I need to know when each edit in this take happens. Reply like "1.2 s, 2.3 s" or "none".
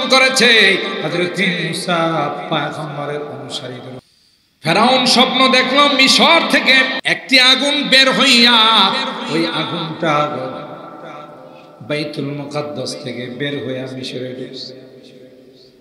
4.0 s, 7.0 s